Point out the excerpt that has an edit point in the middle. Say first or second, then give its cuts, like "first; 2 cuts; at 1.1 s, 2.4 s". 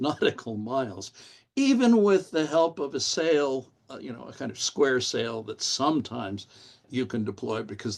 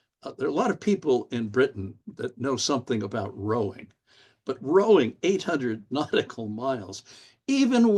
first; 1 cut; at 6.8 s